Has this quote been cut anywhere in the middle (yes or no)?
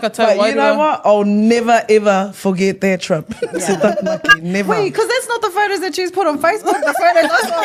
no